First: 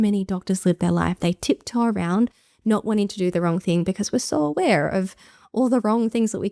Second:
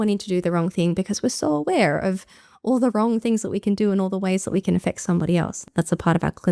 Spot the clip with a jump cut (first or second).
second